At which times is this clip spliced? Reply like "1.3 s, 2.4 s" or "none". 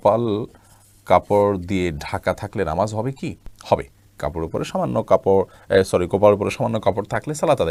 none